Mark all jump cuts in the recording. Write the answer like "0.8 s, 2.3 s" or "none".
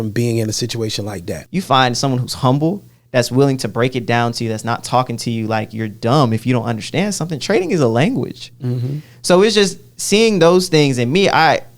1.3 s